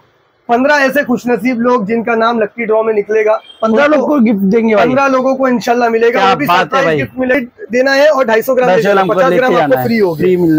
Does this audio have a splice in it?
yes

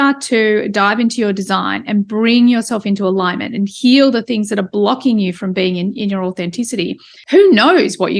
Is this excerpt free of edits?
no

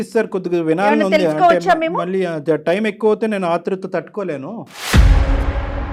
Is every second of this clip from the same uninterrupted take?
yes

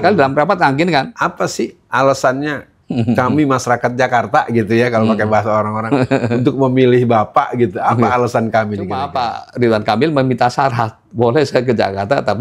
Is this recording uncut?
no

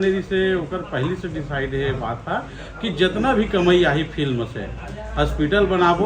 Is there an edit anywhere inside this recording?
no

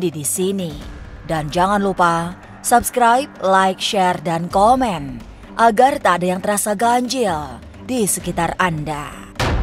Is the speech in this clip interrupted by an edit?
no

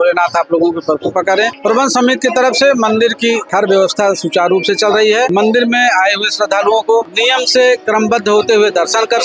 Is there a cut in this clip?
yes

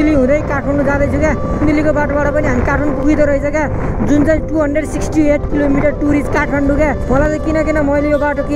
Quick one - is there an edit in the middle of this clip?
yes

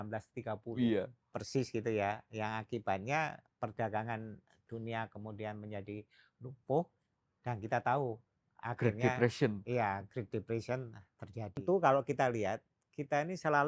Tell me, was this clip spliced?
yes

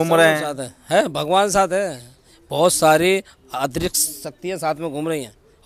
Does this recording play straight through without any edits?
yes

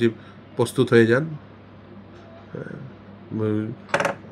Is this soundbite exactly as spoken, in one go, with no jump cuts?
yes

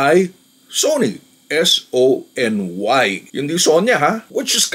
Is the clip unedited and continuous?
no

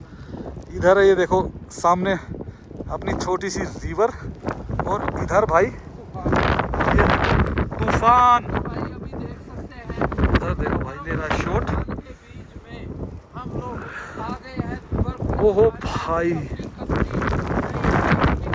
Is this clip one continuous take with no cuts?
yes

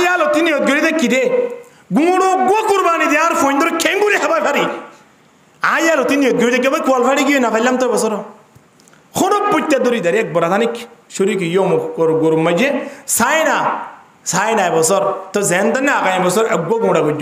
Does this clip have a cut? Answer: no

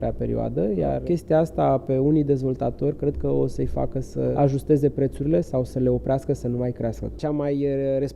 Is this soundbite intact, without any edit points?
no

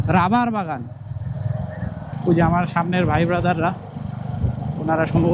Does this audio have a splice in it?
yes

